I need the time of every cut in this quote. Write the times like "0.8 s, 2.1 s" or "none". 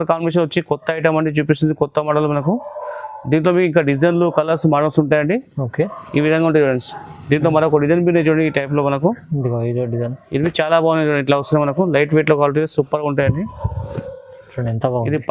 none